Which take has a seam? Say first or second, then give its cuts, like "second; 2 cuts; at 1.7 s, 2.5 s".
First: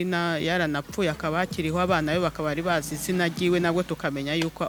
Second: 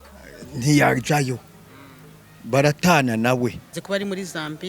second; 1 cut; at 3.7 s